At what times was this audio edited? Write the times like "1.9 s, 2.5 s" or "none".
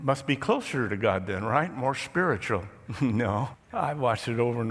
3.6 s